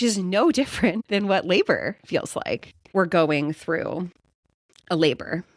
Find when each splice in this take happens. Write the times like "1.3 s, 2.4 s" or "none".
1.0 s, 2.8 s